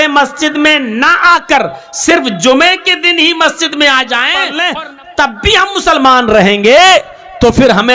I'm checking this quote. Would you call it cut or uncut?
cut